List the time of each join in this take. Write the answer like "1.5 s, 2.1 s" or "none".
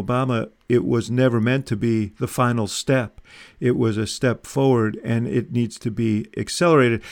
none